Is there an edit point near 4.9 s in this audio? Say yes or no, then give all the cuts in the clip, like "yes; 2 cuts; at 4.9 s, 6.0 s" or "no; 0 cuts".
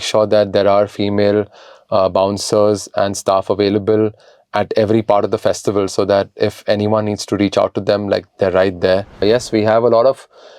no; 1 cut; at 9.2 s